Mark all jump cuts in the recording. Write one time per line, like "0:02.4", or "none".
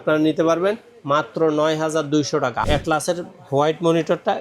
0:02.6